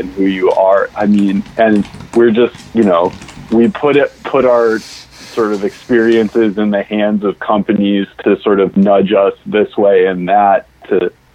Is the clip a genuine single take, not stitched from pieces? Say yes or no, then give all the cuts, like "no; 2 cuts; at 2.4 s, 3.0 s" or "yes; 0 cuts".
yes; 0 cuts